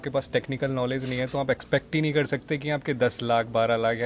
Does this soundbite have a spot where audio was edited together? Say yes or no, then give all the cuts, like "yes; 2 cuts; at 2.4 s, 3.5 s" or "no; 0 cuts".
no; 0 cuts